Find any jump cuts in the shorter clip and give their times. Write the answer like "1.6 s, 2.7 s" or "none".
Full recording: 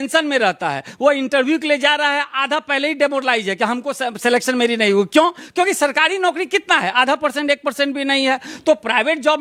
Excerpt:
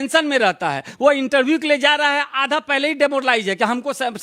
none